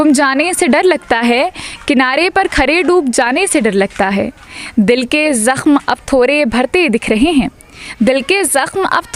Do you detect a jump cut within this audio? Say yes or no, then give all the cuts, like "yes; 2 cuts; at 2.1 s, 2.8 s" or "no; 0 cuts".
no; 0 cuts